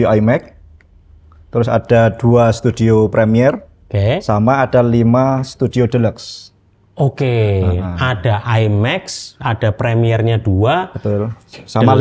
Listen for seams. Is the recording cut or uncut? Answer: uncut